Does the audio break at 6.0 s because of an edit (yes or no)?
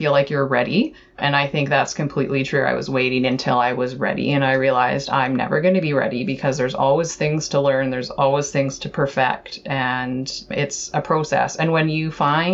no